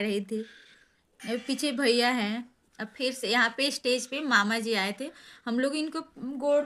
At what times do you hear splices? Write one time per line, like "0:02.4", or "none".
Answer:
none